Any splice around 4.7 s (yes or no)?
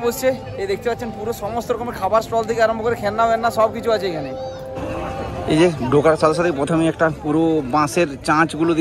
yes